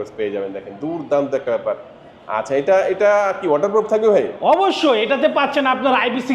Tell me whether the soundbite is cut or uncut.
uncut